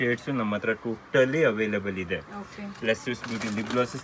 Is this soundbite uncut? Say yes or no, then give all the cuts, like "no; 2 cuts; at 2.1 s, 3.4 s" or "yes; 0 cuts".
yes; 0 cuts